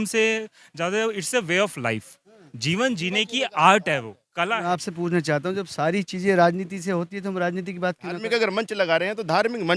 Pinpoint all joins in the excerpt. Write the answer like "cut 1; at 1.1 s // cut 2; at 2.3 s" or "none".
cut 1; at 4.6 s // cut 2; at 8.2 s